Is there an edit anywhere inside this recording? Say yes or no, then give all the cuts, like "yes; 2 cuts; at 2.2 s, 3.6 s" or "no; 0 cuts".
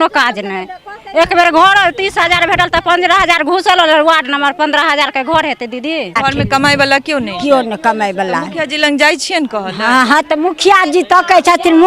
yes; 1 cut; at 6.2 s